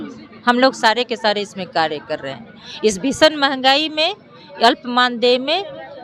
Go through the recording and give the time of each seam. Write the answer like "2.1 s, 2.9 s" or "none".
none